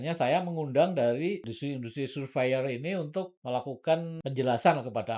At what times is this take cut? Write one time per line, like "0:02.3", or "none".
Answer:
0:01.6
0:03.4
0:04.1